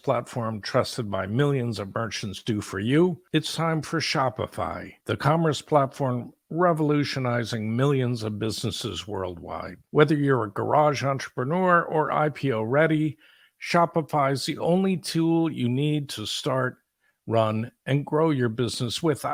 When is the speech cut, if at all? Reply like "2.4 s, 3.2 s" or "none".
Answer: none